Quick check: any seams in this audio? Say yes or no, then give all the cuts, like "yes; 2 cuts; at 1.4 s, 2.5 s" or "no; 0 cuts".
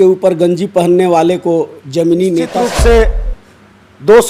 yes; 1 cut; at 2.5 s